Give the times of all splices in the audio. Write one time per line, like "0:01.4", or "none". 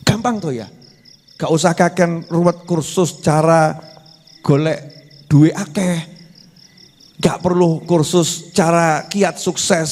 none